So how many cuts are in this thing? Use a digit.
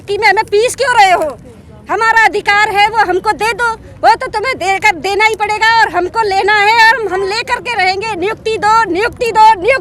0